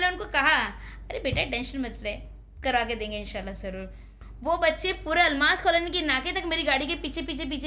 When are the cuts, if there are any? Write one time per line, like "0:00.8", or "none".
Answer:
none